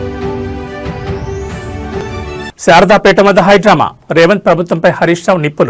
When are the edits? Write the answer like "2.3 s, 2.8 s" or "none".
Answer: 1.9 s